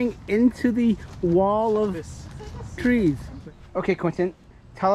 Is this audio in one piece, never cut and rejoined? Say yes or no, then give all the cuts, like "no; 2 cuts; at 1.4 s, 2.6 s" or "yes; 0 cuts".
no; 1 cut; at 3.3 s